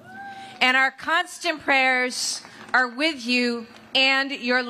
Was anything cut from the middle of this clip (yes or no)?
no